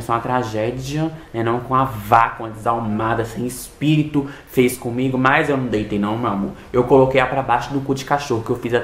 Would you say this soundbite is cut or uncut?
uncut